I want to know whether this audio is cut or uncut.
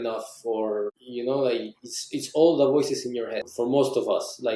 cut